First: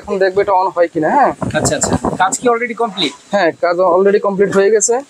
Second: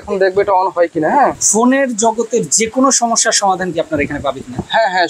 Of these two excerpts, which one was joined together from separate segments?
second; 1 cut; at 1.4 s

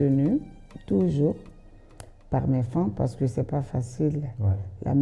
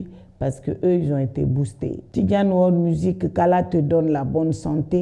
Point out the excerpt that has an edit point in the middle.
second; 1 cut; at 2.0 s

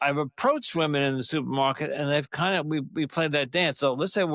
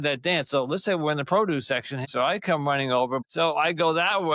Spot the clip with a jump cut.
second; 2 cuts; at 2.1 s, 3.3 s

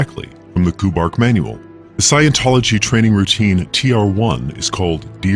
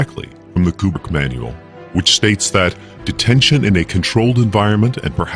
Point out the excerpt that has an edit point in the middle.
first; 1 cut; at 0.9 s

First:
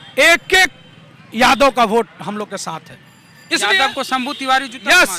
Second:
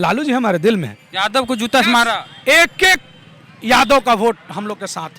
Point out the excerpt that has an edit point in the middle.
second; 1 cut; at 1.0 s

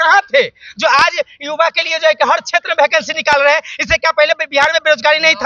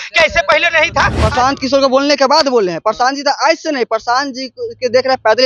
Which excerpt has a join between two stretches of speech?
second; 1 cut; at 1.2 s

